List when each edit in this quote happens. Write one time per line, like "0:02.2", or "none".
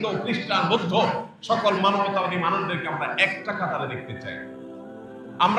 none

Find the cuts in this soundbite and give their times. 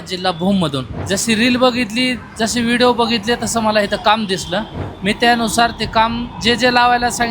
0:00.9

